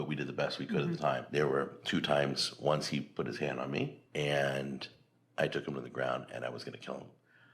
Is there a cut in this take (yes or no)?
yes